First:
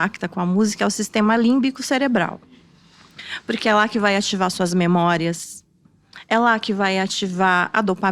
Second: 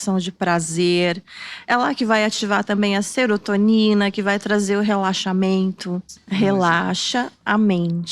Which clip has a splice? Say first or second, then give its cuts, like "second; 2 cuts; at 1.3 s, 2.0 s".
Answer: second; 1 cut; at 6.1 s